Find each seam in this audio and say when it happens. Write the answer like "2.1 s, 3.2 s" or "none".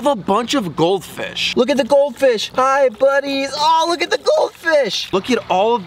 1.5 s, 2.5 s, 5.0 s

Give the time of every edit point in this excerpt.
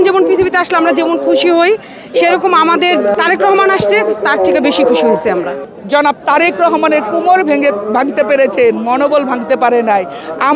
3.1 s, 5.6 s

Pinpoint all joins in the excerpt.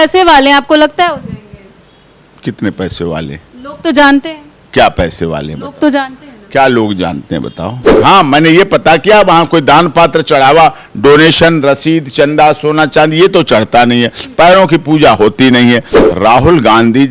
7.8 s, 16.0 s

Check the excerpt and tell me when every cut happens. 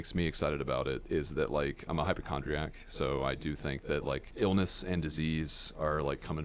1.9 s, 4.3 s

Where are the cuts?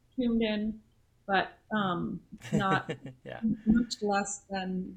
none

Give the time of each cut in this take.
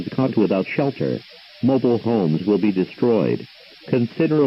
none

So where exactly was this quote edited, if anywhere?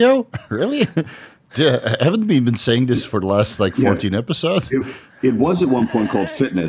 none

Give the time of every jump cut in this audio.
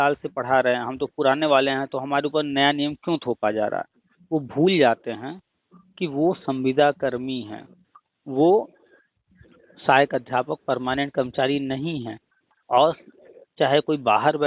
none

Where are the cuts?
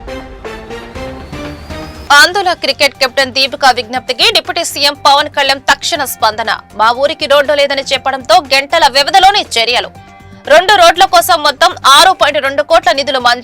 2.0 s

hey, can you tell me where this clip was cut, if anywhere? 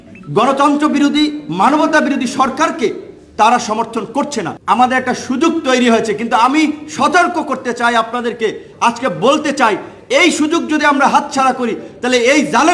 4.5 s

